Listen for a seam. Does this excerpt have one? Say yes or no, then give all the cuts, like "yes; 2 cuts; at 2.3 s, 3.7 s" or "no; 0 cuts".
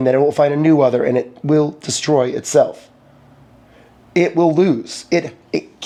no; 0 cuts